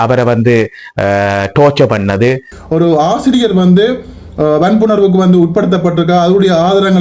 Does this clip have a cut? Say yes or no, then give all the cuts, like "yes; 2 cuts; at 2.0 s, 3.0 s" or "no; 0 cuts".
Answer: yes; 1 cut; at 2.5 s